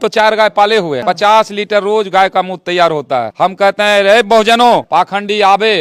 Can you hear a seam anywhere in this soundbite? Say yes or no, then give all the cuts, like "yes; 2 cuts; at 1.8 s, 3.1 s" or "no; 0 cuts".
yes; 3 cuts; at 1.0 s, 3.3 s, 4.9 s